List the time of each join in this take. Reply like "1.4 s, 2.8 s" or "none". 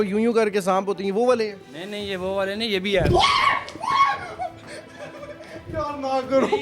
none